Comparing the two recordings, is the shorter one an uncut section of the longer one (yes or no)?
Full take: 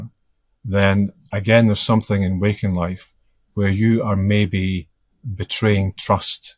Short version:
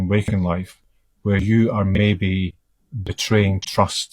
yes